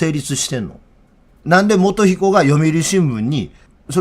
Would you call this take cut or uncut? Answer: cut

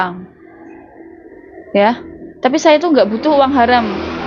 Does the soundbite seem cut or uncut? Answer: uncut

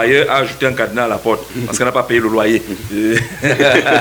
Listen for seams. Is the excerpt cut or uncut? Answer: uncut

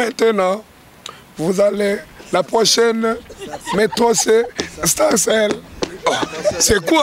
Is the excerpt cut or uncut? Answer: uncut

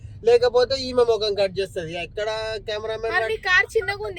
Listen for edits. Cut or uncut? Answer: uncut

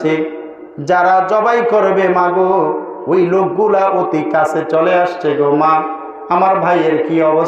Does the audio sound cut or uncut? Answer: uncut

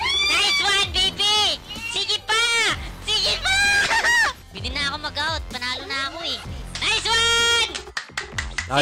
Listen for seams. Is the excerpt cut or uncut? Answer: cut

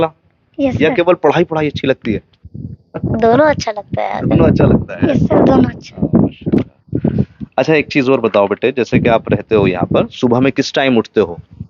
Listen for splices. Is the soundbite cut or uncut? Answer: uncut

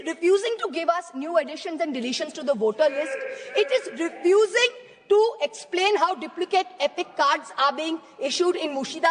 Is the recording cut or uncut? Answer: uncut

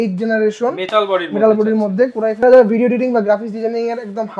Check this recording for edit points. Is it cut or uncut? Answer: cut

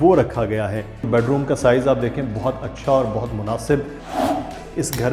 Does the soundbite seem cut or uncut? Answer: cut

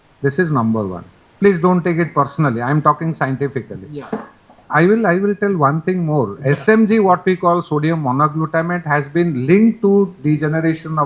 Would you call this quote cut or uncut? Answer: cut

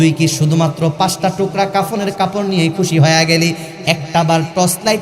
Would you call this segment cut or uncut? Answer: uncut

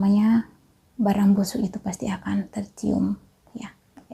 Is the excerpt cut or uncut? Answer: uncut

